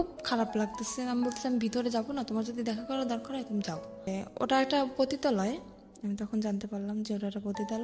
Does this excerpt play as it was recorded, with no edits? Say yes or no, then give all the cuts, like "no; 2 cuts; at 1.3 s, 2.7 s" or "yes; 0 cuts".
no; 1 cut; at 4.2 s